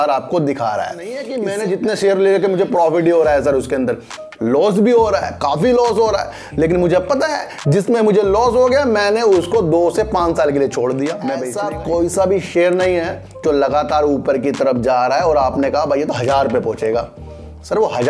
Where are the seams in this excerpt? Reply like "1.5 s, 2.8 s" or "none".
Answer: 1.3 s, 11.5 s